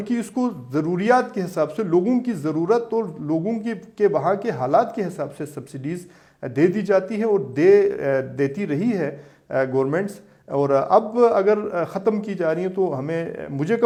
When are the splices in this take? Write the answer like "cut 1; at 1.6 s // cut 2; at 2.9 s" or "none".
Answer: none